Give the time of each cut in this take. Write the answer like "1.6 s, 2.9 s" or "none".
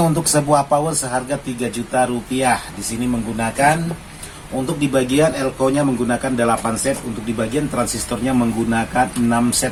none